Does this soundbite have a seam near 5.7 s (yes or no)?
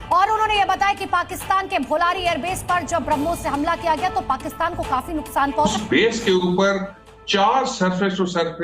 yes